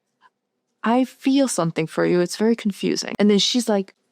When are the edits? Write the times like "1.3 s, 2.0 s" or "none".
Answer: 3.0 s